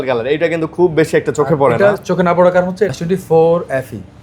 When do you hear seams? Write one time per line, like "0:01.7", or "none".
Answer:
0:03.0